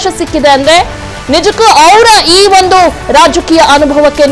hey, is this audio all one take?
no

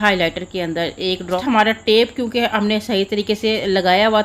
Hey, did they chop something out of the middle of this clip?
yes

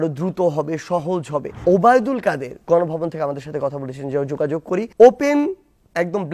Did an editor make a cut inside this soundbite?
yes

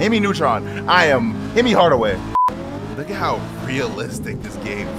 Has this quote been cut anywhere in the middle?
yes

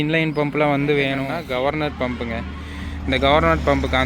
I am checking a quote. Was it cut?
yes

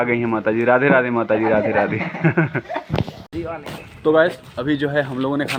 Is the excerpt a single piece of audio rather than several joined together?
yes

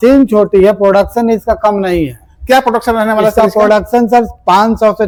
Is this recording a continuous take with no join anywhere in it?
yes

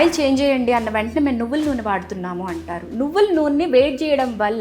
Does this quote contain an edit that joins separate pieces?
no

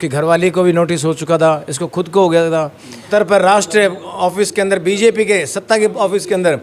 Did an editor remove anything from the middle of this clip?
yes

